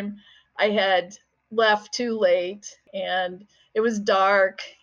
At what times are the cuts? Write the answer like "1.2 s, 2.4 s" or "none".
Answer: 2.8 s

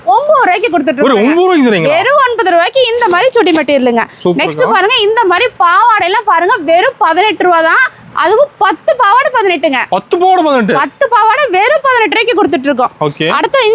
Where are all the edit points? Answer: none

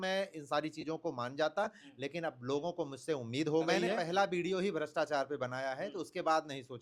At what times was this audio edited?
4.0 s

